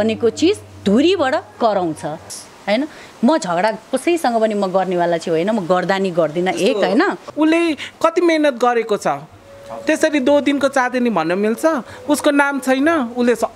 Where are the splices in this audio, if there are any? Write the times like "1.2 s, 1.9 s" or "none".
2.4 s, 7.3 s